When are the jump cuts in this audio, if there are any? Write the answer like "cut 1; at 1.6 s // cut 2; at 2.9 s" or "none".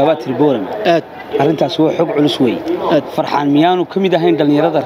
none